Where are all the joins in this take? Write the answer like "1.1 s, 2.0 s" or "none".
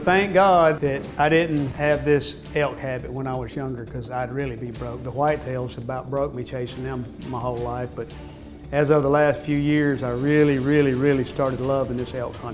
1.0 s, 1.7 s, 2.4 s